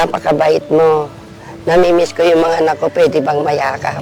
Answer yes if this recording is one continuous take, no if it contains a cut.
yes